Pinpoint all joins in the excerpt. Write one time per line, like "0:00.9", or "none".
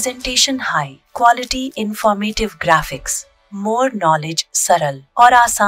none